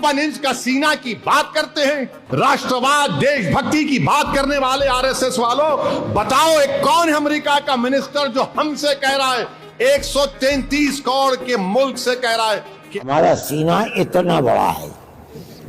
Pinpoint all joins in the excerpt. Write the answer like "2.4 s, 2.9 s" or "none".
2.2 s, 12.9 s